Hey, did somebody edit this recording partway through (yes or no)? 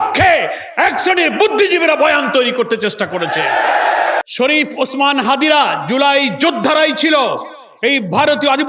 yes